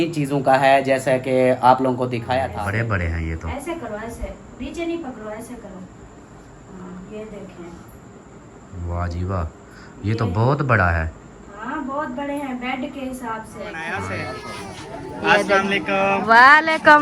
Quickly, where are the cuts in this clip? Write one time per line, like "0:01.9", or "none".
0:02.5
0:13.9